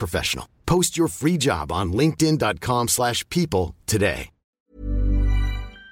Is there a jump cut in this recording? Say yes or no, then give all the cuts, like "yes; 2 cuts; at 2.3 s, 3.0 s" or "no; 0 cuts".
yes; 1 cut; at 4.6 s